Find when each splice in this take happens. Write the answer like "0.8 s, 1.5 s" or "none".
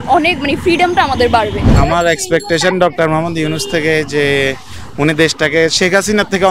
1.7 s